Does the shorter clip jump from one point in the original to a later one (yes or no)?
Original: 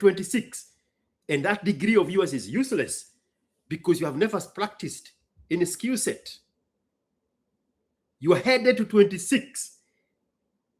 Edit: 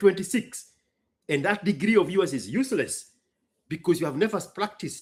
no